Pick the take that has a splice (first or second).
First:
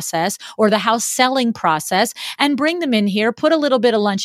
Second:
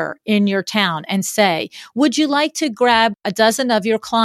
second